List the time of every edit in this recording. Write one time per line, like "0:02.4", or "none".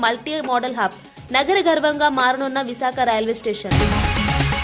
0:03.7